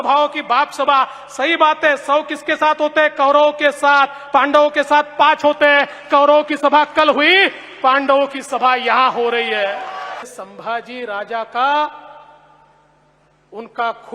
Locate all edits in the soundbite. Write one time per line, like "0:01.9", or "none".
0:10.3